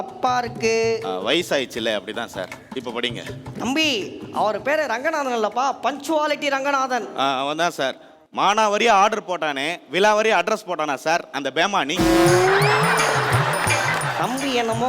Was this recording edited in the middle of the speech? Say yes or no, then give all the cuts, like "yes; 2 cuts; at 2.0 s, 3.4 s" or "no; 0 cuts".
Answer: no; 0 cuts